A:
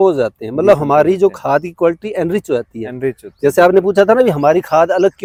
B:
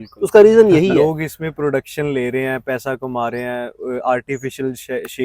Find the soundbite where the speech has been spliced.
B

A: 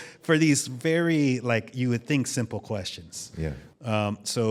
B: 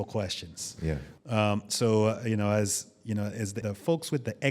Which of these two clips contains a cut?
B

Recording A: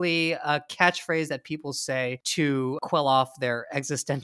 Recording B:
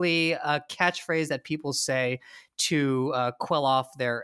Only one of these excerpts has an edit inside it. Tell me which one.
A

